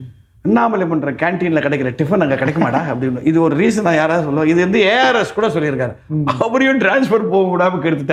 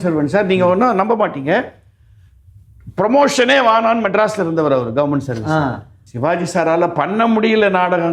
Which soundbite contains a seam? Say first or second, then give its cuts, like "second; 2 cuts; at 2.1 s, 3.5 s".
second; 1 cut; at 6.0 s